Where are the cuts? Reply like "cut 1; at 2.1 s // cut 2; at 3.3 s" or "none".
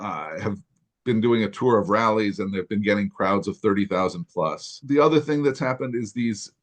cut 1; at 4.7 s